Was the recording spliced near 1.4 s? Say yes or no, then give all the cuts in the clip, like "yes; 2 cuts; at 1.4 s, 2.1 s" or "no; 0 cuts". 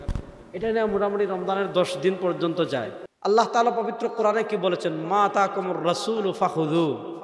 no; 1 cut; at 3.0 s